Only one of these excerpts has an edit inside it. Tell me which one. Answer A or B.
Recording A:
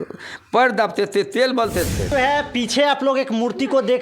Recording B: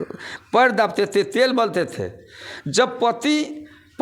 A